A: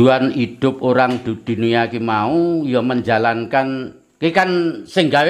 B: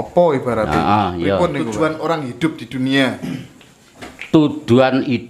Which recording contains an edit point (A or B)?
B